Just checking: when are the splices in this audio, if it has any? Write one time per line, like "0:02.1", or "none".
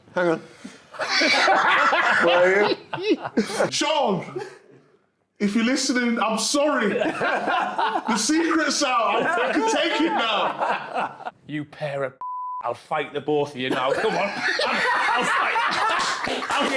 0:03.7
0:11.2